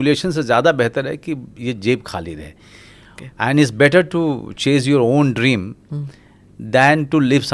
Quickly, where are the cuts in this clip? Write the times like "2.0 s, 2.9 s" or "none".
none